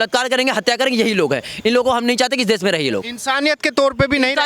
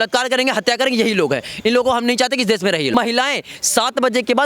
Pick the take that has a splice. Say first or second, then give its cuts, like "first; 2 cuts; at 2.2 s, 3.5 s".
second; 1 cut; at 2.9 s